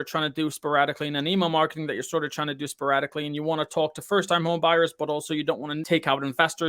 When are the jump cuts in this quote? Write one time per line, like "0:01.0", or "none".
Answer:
0:05.7